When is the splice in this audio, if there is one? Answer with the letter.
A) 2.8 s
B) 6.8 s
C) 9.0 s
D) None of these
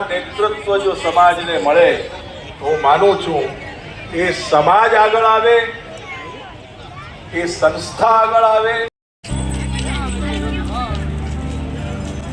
D